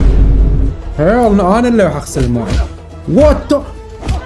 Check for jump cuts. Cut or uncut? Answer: uncut